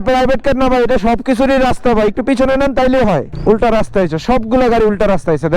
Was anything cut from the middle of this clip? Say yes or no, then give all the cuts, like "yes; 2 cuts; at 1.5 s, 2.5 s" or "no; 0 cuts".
yes; 1 cut; at 3.3 s